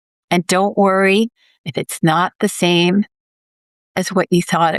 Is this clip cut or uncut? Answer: uncut